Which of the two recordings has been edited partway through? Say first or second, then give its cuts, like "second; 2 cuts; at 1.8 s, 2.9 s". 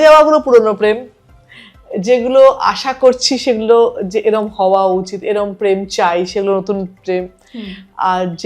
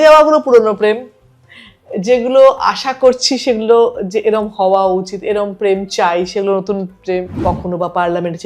second; 1 cut; at 7.4 s